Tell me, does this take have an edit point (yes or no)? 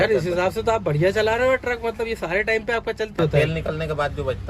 yes